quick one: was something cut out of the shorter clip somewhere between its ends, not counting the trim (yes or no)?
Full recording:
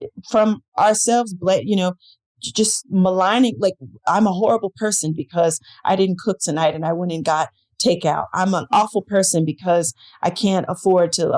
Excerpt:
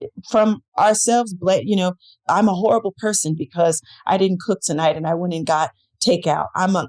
yes